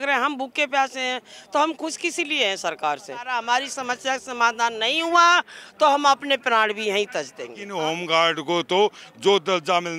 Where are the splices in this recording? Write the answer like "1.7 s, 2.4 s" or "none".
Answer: 3.3 s, 7.6 s